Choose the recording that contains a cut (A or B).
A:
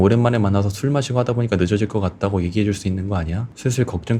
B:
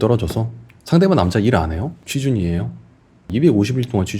B